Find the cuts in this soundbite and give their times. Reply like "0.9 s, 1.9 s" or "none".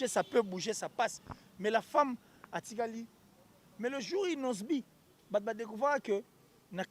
3.6 s